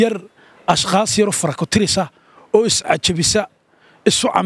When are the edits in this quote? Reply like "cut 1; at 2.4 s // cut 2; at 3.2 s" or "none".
none